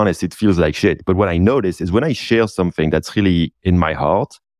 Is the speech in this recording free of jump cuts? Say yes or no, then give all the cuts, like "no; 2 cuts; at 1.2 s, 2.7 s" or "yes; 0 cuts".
no; 1 cut; at 1.0 s